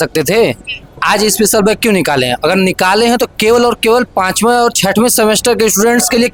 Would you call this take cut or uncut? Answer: uncut